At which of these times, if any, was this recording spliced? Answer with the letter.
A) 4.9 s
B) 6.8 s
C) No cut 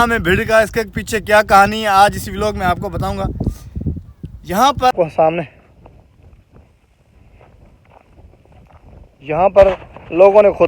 A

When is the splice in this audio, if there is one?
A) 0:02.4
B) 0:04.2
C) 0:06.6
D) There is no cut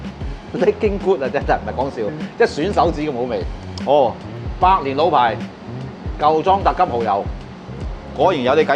D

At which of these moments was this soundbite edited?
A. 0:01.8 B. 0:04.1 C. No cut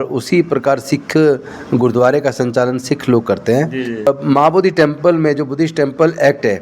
B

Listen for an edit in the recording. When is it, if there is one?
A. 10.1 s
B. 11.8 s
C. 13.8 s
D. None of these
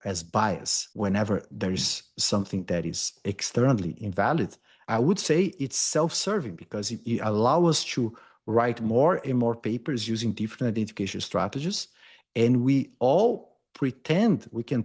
D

